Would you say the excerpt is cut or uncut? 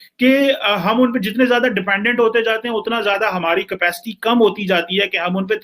uncut